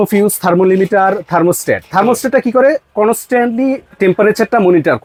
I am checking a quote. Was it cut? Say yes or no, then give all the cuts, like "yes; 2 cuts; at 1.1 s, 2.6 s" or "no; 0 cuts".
no; 0 cuts